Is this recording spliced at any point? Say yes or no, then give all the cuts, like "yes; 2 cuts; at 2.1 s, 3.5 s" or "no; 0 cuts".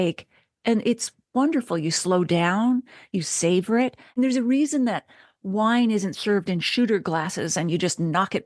yes; 1 cut; at 4.2 s